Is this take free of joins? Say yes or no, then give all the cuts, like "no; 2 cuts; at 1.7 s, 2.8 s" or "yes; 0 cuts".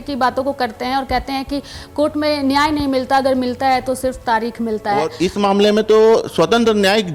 no; 1 cut; at 5.1 s